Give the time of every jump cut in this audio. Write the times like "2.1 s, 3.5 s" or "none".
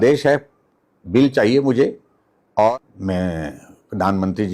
2.7 s